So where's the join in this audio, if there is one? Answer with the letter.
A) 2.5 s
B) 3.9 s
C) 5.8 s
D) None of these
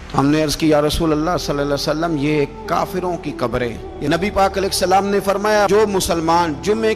B